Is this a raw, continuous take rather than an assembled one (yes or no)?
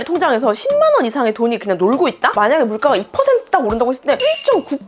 yes